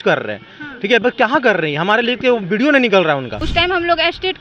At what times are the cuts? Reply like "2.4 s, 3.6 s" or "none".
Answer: 3.4 s